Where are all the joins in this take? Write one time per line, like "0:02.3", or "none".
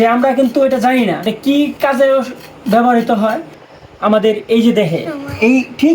0:01.2
0:03.5